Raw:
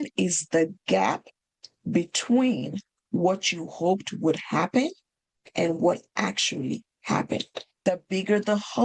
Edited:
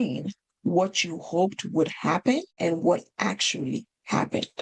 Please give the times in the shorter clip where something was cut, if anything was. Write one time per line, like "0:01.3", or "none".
0:02.5